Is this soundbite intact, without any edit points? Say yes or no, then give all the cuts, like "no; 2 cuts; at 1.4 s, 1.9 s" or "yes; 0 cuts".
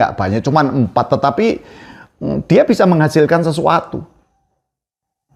yes; 0 cuts